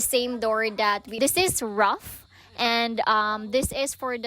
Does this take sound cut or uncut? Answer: cut